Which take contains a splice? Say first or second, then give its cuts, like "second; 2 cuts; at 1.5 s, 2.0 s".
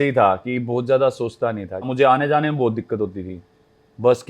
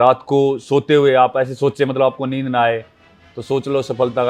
first; 1 cut; at 1.8 s